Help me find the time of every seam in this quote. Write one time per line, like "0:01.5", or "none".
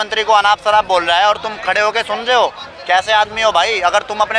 none